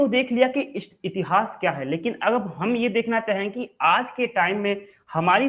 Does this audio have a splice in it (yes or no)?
no